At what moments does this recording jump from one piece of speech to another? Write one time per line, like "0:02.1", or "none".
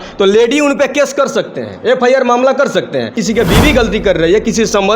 0:03.2